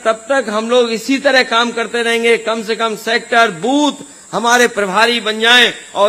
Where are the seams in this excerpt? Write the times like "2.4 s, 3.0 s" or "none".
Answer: none